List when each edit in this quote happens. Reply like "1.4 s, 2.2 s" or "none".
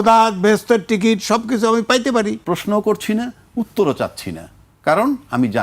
2.4 s